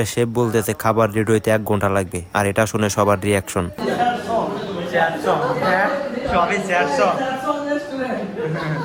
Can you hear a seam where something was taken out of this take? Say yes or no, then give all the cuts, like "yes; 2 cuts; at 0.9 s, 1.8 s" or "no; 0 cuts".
no; 0 cuts